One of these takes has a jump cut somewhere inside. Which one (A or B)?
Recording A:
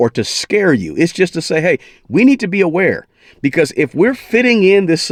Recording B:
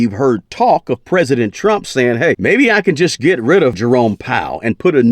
B